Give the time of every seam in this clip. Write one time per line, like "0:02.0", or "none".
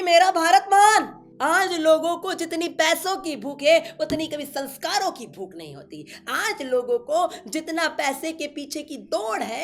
0:01.2